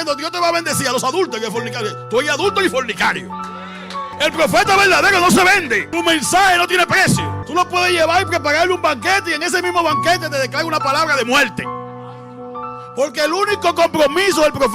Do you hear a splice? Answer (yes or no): yes